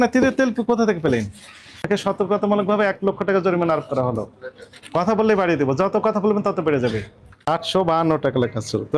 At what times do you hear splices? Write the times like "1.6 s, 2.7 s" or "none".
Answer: 1.8 s, 7.3 s